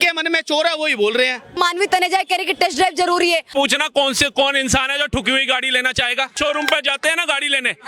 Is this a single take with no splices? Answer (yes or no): no